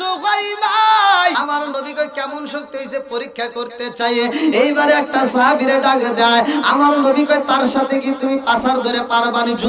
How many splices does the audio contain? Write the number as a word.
one